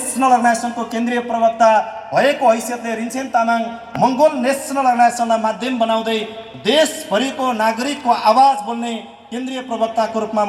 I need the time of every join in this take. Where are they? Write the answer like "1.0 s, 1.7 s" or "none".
none

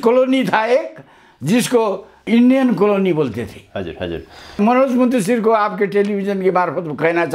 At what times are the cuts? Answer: 2.2 s, 4.6 s

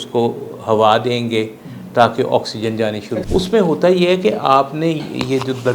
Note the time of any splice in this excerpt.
3.1 s

